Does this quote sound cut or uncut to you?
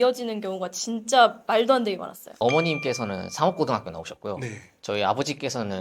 cut